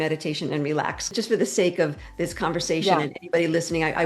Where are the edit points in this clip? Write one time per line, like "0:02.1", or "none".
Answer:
0:01.1